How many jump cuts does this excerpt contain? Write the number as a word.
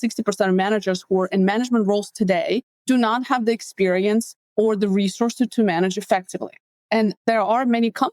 three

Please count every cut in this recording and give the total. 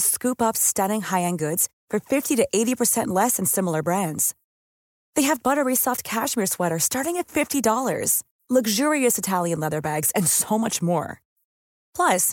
zero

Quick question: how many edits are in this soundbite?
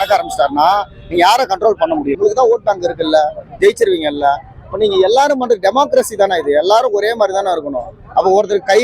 one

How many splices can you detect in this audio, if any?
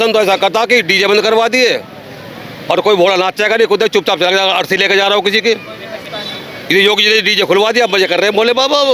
zero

